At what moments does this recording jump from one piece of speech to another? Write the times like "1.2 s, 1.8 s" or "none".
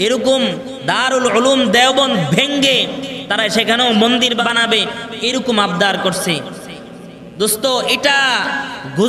4.4 s